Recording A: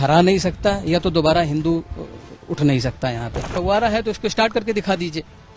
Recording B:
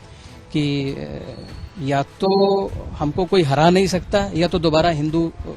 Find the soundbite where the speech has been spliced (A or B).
A